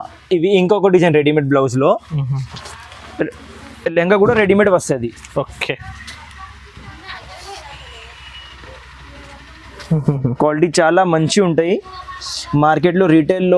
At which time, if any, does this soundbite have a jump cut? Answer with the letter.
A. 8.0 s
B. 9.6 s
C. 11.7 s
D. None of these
D